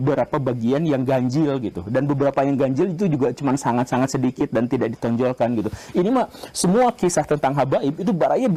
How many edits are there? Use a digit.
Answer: 0